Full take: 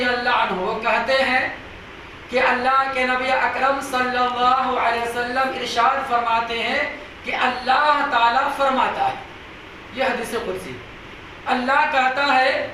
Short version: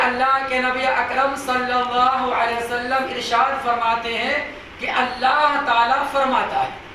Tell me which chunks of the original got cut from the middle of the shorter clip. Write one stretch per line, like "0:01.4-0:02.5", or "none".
none